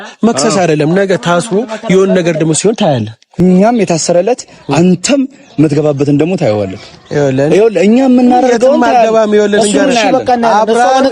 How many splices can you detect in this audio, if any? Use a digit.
1